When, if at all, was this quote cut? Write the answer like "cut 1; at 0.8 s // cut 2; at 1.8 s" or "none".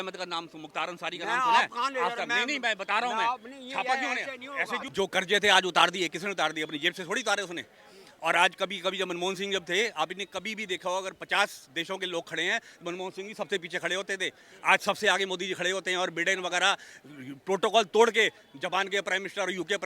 cut 1; at 4.9 s